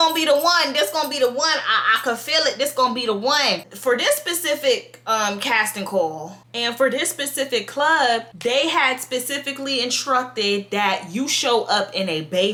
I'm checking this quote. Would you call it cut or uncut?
uncut